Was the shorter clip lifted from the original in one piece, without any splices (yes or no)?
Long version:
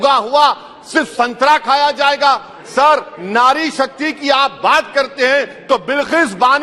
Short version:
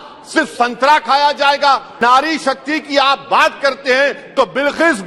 no